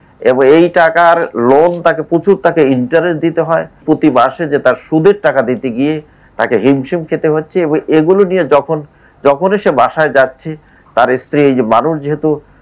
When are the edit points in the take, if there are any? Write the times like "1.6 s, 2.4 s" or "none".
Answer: 3.8 s